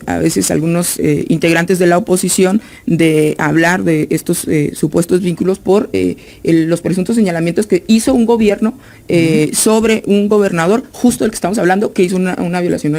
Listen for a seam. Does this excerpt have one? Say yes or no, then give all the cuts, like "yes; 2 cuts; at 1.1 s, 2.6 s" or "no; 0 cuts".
no; 0 cuts